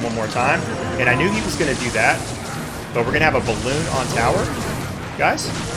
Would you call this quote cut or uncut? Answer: uncut